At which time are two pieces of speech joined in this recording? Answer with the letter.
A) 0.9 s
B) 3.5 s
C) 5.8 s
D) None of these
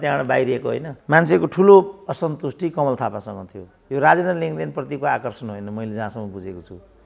A